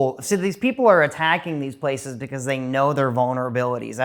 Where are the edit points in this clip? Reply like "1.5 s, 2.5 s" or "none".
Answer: none